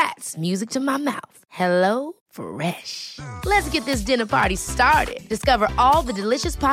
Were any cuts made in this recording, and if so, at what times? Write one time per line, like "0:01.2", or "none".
none